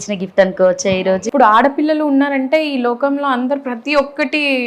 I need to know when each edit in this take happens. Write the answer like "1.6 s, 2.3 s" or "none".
1.2 s